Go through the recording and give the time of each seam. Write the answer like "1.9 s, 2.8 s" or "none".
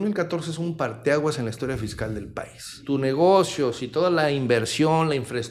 2.8 s